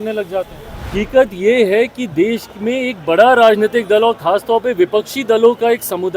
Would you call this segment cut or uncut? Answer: cut